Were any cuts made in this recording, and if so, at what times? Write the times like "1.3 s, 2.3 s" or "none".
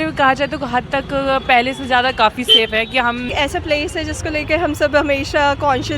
3.3 s